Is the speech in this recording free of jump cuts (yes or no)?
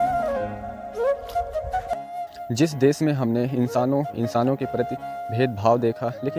no